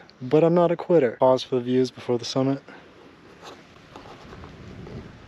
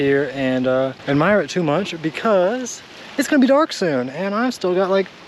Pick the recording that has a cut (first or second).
first